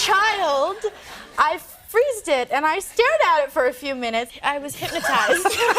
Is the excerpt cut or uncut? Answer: cut